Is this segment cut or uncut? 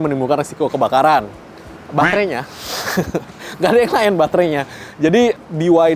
uncut